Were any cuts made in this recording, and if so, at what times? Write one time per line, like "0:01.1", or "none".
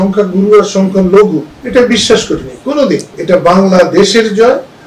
0:01.5
0:03.1